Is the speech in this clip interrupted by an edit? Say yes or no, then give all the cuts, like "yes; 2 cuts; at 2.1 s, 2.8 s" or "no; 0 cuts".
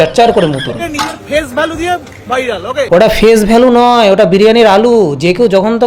yes; 2 cuts; at 0.8 s, 2.9 s